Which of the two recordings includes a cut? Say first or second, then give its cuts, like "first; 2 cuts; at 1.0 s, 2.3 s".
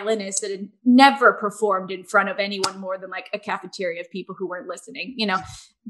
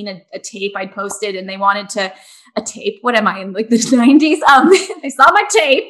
second; 1 cut; at 4.9 s